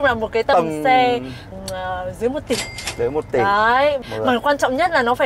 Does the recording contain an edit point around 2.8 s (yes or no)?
no